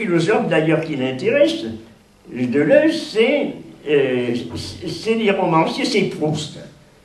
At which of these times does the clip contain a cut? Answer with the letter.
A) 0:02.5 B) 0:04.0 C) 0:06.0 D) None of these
B